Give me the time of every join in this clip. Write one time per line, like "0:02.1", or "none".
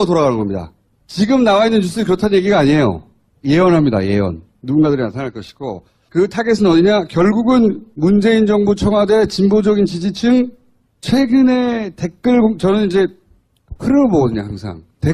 0:02.5